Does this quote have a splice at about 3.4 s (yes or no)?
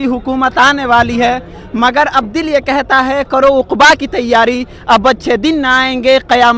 no